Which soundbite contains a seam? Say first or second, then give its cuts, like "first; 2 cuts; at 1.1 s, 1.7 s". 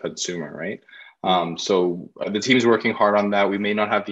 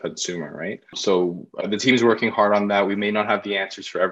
second; 1 cut; at 0.9 s